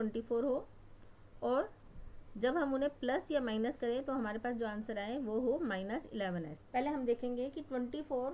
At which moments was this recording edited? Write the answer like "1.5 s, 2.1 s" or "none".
6.6 s